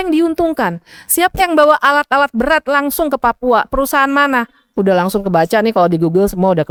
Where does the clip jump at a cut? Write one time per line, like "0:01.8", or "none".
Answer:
none

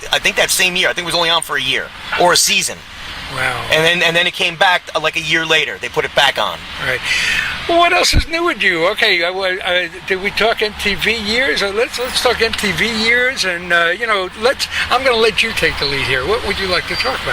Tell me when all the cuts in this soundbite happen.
0:01.5

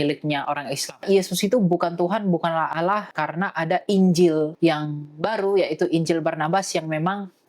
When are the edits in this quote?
0:01.0
0:03.1
0:04.5

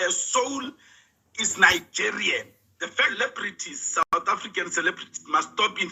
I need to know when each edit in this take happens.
0:03.1

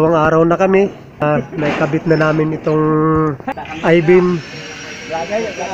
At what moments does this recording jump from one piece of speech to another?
0:01.2
0:03.4

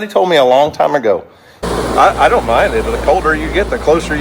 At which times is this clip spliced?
0:01.6

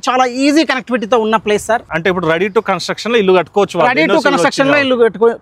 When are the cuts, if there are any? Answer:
0:01.9

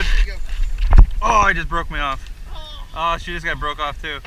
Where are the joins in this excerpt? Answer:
none

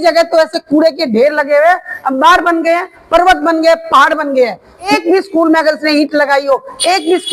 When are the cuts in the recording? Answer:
0:04.9

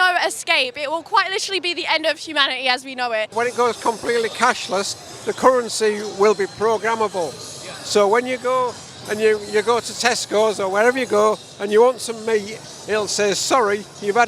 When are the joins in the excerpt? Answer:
0:03.3

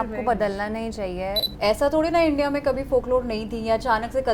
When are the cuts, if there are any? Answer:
0:01.5

